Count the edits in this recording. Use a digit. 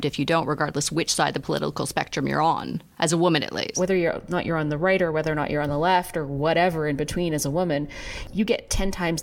3